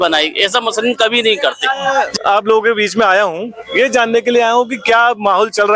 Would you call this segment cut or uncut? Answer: uncut